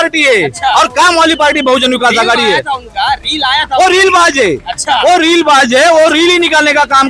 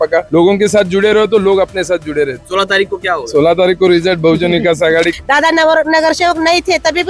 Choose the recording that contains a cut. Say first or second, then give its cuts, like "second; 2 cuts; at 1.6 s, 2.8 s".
second; 2 cuts; at 2.4 s, 5.1 s